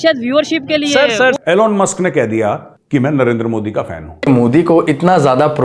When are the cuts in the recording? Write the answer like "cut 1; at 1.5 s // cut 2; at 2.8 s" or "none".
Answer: cut 1; at 1.4 s // cut 2; at 4.1 s